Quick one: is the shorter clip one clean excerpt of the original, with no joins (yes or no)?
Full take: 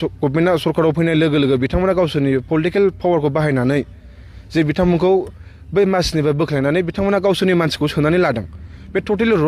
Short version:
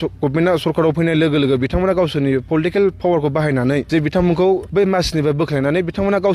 no